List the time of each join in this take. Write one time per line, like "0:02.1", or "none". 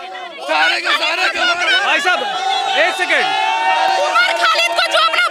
none